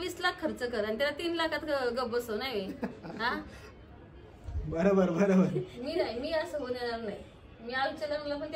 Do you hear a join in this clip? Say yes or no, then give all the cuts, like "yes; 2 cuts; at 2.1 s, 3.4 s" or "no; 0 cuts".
no; 0 cuts